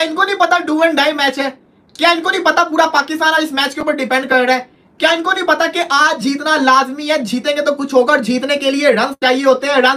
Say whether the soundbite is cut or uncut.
uncut